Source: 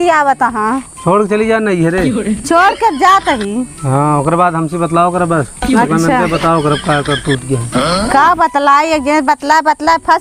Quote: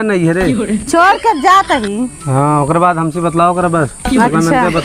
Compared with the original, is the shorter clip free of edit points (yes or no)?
yes